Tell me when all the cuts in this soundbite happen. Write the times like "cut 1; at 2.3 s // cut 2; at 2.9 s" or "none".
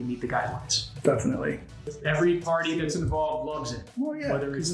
cut 1; at 1.8 s